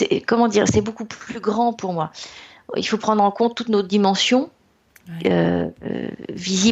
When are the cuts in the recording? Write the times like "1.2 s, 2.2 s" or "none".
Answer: none